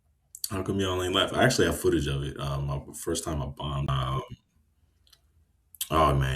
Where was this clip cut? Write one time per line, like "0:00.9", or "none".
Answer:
0:03.9